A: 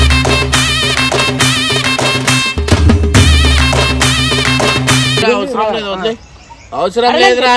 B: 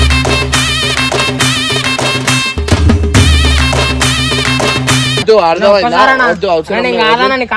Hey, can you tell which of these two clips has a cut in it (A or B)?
B